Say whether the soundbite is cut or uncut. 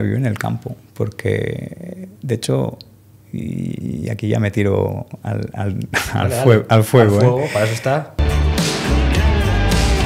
cut